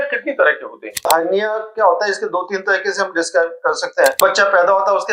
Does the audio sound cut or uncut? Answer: cut